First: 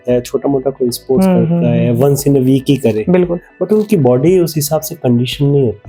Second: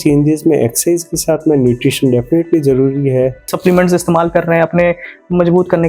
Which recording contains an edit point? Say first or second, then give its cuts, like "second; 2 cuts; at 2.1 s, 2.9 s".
second; 1 cut; at 3.5 s